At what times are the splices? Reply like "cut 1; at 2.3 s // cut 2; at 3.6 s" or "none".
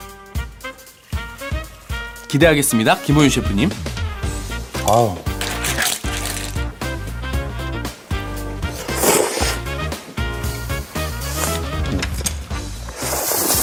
none